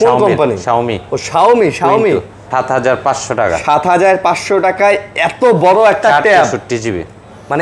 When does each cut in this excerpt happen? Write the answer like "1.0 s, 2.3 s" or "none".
2.4 s